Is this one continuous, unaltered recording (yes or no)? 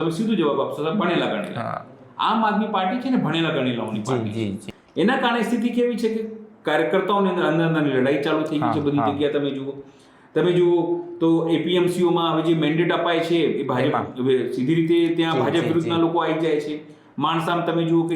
no